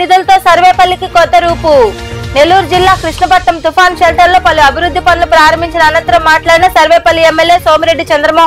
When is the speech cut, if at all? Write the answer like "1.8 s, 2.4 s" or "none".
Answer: none